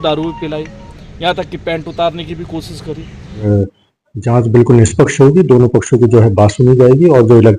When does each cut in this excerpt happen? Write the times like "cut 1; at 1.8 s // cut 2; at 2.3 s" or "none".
cut 1; at 3.5 s